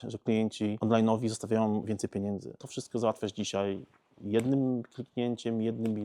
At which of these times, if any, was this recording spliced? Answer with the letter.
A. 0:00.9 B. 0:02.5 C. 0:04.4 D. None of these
B